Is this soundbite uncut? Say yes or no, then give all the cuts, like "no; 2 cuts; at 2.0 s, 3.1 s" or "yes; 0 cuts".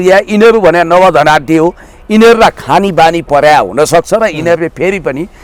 yes; 0 cuts